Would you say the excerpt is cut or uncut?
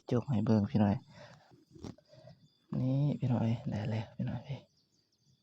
cut